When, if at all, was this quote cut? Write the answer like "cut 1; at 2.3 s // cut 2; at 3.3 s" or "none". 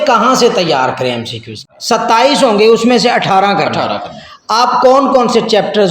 cut 1; at 1.6 s